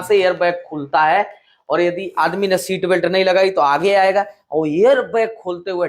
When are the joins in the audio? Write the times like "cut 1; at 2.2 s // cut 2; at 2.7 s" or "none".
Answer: none